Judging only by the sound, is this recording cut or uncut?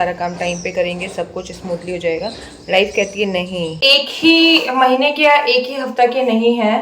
cut